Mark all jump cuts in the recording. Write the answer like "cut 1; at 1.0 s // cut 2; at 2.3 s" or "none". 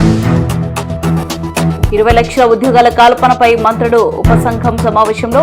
cut 1; at 1.6 s